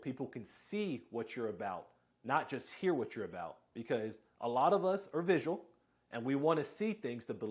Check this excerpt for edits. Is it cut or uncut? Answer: uncut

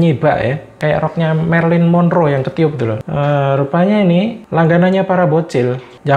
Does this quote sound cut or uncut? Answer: cut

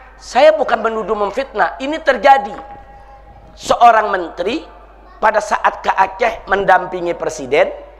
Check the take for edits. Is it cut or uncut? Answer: uncut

